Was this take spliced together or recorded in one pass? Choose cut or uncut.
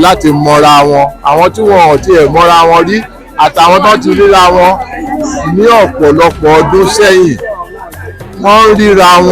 uncut